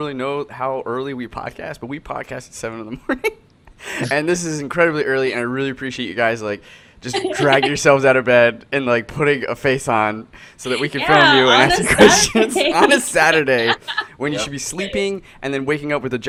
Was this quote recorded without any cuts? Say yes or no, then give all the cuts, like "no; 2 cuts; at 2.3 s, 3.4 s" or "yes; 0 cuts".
yes; 0 cuts